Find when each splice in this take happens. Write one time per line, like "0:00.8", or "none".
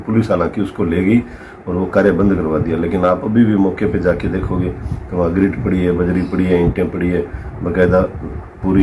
none